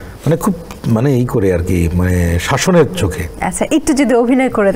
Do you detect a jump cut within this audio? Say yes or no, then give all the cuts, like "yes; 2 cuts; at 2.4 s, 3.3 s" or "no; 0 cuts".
no; 0 cuts